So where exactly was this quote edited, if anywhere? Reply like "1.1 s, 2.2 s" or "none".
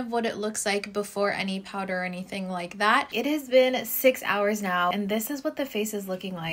3.1 s, 4.9 s